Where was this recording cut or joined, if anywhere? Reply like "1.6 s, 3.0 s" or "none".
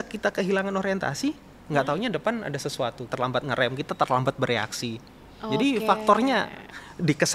3.0 s